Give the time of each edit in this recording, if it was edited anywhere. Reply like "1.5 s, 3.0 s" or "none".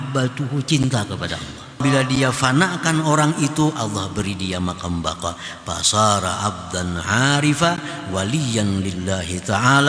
1.8 s